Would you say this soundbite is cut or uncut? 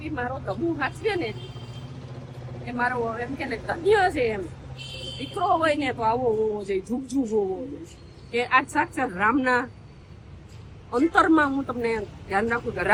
uncut